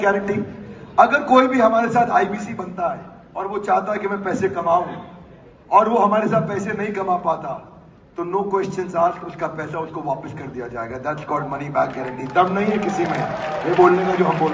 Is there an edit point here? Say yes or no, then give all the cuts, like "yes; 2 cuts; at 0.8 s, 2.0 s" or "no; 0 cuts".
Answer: no; 0 cuts